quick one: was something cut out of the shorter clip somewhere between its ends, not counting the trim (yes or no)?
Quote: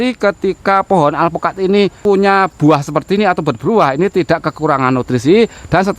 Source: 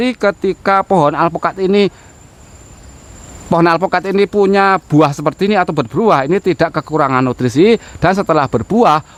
yes